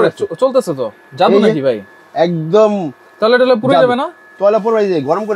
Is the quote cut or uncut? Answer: uncut